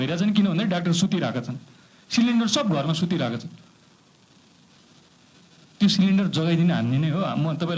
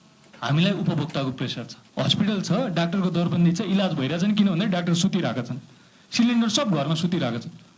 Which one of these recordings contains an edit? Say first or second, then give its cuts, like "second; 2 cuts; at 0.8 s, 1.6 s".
second; 1 cut; at 1.8 s